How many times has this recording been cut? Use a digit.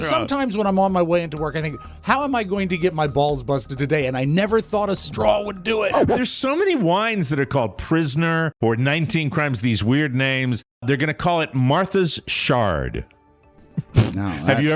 3